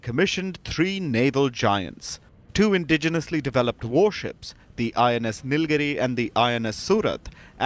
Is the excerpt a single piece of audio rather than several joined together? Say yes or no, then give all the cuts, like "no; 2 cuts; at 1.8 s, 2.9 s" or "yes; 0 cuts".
yes; 0 cuts